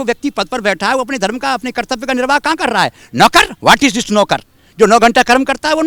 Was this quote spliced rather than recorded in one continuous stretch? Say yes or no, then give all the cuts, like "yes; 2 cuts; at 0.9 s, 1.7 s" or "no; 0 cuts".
no; 0 cuts